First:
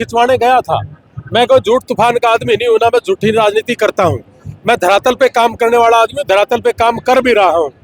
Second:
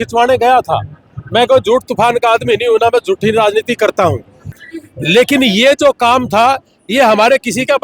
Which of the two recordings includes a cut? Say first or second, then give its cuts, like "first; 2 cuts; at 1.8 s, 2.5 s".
second; 1 cut; at 4.5 s